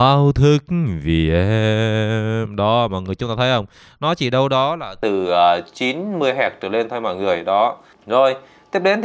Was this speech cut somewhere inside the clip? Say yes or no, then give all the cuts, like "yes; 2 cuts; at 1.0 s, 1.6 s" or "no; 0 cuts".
no; 0 cuts